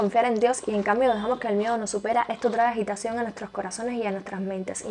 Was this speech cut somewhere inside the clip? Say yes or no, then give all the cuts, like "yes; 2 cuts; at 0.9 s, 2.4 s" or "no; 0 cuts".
no; 0 cuts